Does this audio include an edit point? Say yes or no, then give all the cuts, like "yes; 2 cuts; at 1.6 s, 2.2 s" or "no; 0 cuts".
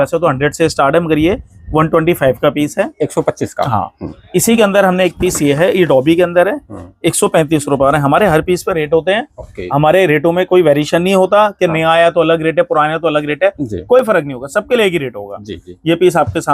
no; 0 cuts